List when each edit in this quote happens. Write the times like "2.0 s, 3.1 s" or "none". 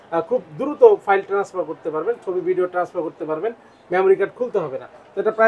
none